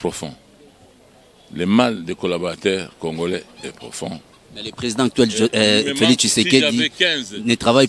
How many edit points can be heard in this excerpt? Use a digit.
0